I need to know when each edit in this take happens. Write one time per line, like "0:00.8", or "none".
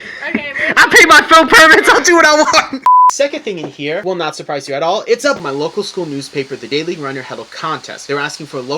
0:03.1
0:05.4